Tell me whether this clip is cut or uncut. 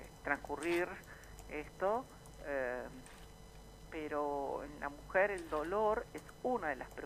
cut